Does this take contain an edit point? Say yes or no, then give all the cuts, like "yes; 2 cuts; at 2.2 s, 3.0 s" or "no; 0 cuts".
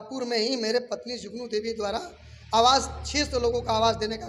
no; 0 cuts